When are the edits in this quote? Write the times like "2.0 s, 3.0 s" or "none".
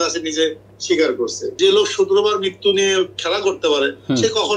1.4 s